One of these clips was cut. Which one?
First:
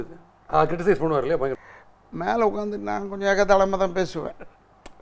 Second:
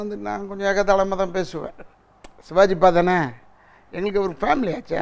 first; 1 cut; at 1.7 s

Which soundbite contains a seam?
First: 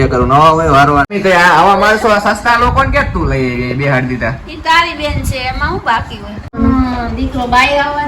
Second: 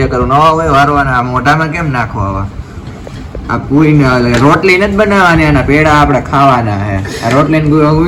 first; 2 cuts; at 1.1 s, 6.5 s

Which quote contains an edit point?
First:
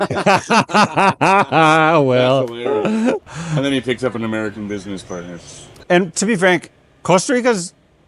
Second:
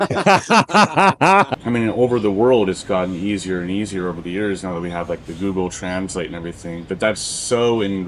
second; 1 cut; at 1.5 s

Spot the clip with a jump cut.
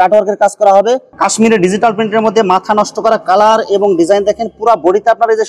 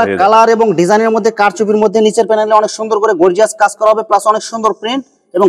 first; 1 cut; at 1.1 s

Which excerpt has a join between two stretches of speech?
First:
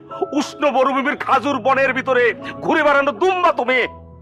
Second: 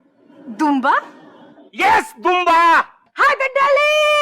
second; 1 cut; at 3.0 s

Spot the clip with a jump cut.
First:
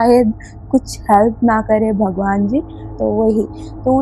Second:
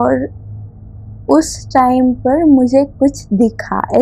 first; 1 cut; at 2.9 s

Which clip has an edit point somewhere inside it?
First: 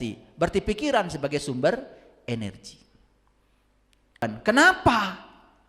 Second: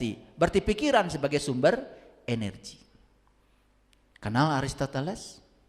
first; 1 cut; at 4.2 s

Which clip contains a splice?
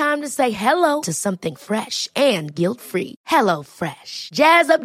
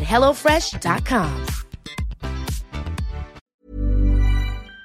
second; 1 cut; at 3.4 s

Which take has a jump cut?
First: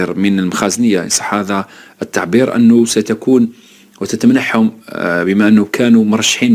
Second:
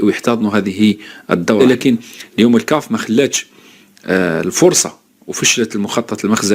second; 1 cut; at 1.6 s

